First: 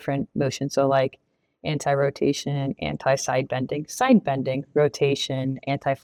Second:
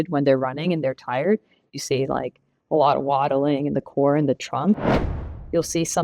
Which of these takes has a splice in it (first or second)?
second